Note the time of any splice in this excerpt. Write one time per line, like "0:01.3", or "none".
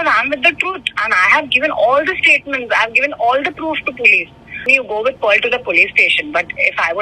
0:04.7